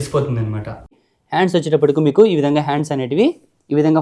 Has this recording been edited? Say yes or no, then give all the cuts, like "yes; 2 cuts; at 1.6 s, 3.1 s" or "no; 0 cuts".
yes; 1 cut; at 0.9 s